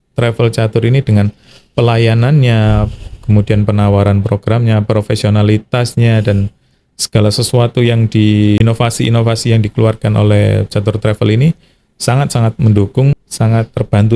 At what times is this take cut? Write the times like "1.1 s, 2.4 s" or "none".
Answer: 8.6 s, 13.2 s